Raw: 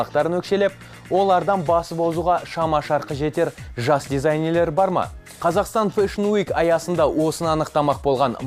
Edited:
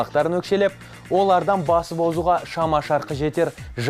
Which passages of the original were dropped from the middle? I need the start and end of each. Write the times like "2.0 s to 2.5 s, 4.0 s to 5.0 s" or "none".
none